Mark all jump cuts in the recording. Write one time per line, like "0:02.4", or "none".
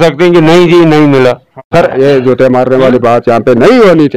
0:01.6